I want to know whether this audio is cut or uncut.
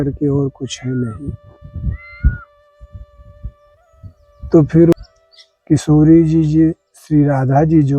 cut